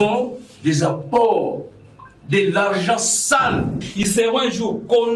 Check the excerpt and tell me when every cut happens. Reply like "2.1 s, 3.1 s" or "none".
4.1 s